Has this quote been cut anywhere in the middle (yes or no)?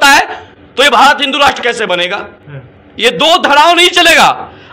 no